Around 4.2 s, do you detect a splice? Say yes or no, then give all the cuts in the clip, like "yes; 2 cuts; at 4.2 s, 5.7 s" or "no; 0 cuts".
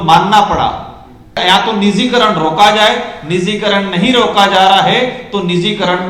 no; 1 cut; at 1.4 s